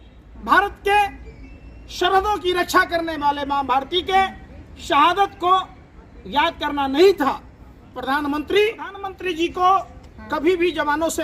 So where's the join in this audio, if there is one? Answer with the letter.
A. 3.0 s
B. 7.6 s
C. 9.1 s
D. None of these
C